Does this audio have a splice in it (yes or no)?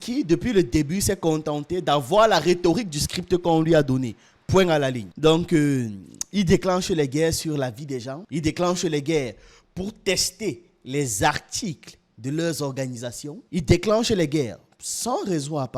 yes